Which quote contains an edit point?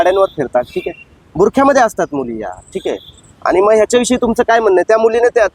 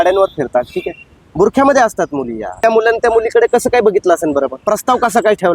second; 2 cuts; at 2.6 s, 4.6 s

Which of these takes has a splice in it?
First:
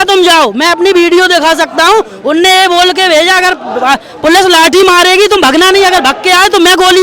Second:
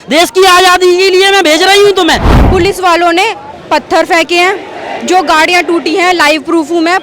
second; 1 cut; at 2.3 s

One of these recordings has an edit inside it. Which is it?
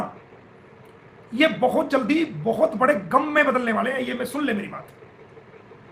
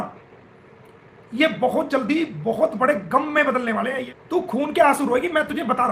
second; 1 cut; at 4.1 s

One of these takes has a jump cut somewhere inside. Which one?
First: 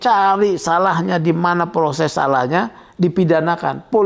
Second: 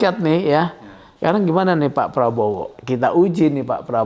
second; 1 cut; at 2.7 s

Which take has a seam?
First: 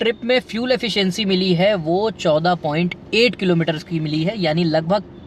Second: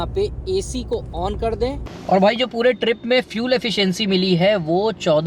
second; 1 cut; at 1.9 s

